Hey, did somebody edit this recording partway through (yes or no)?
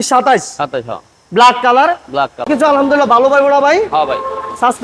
yes